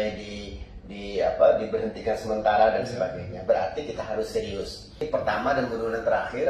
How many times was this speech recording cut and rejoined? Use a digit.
1